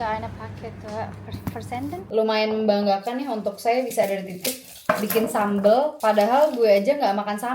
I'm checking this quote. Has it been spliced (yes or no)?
yes